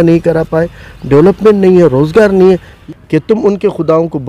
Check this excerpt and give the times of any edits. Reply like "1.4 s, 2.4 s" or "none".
2.7 s